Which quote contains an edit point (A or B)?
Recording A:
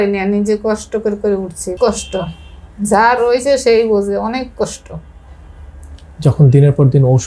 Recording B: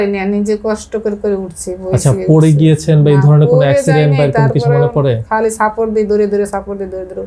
A